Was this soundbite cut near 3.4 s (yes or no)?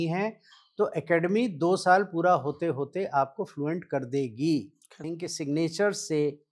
no